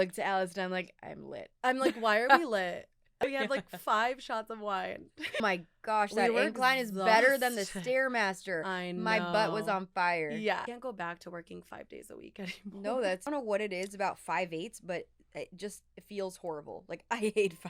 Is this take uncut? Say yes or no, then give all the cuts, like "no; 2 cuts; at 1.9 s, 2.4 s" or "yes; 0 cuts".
no; 4 cuts; at 3.2 s, 5.4 s, 10.7 s, 13.3 s